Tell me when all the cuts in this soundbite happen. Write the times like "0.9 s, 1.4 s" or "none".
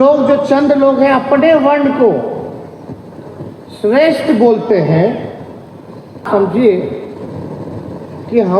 6.2 s